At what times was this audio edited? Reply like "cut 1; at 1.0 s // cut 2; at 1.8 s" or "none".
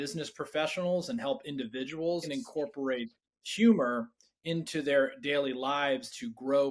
cut 1; at 2.2 s